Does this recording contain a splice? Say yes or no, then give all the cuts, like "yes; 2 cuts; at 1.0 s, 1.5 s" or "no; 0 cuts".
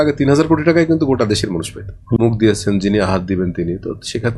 yes; 1 cut; at 2.2 s